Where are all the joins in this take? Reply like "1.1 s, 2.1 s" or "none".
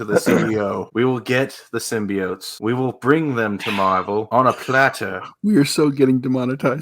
0.9 s, 2.5 s, 4.3 s